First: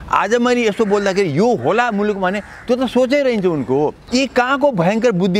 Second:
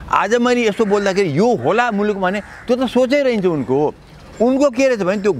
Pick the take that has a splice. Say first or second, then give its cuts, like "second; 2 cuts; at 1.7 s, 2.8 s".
first; 1 cut; at 4.0 s